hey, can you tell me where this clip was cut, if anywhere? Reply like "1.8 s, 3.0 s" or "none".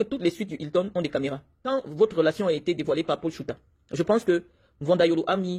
1.6 s